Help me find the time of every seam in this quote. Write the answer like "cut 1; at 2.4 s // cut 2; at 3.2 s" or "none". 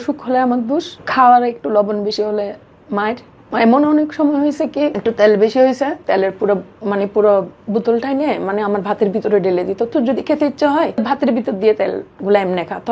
cut 1; at 1.0 s // cut 2; at 3.3 s // cut 3; at 5.0 s // cut 4; at 6.0 s // cut 5; at 11.0 s

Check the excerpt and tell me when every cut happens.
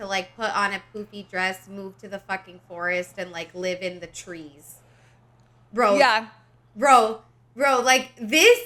none

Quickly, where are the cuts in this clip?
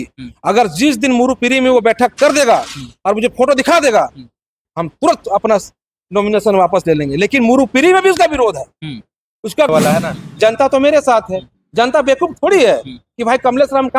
cut 1; at 9.7 s

